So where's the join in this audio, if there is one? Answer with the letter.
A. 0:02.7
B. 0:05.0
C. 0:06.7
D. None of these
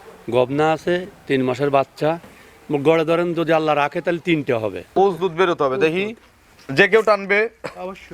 B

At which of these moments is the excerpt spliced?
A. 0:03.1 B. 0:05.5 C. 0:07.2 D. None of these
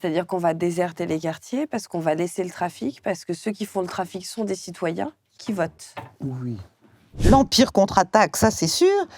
C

